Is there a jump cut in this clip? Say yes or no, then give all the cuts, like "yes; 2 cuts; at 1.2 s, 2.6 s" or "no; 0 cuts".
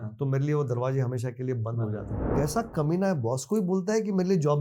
yes; 1 cut; at 2.2 s